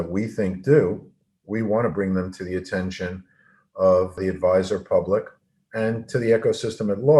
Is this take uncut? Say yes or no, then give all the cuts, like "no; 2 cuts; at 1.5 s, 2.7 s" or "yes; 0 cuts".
no; 1 cut; at 4.2 s